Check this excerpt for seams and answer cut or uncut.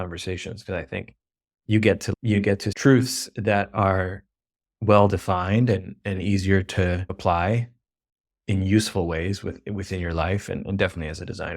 cut